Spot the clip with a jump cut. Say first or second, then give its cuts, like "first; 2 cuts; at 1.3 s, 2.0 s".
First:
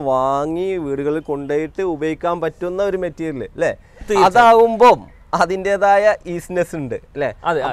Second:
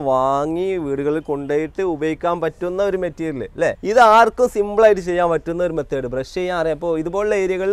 second; 1 cut; at 3.8 s